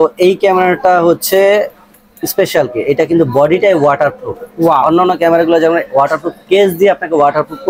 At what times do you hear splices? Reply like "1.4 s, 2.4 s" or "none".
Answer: none